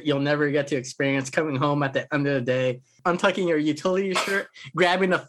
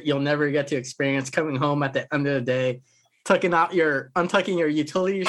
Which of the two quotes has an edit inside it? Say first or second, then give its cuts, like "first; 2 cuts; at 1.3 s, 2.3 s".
first; 1 cut; at 2.9 s